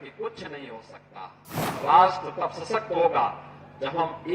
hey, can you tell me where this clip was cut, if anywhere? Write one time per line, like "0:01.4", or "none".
0:01.8

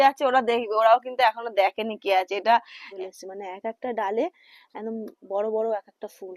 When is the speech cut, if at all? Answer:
0:02.9

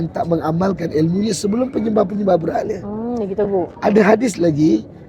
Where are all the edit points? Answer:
none

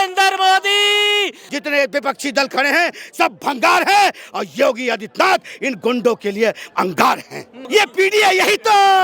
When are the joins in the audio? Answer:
0:01.4
0:07.6

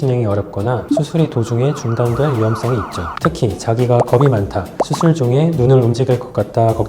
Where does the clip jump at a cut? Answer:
0:03.1

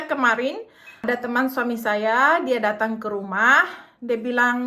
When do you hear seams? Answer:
0:01.1

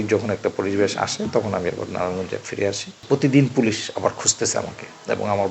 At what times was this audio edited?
0:02.9

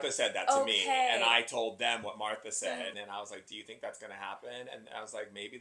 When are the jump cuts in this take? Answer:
0:02.9

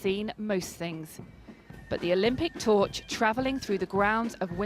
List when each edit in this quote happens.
0:02.3

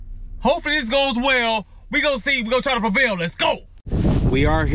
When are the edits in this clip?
0:03.8

